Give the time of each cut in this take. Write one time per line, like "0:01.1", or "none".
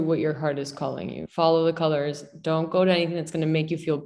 none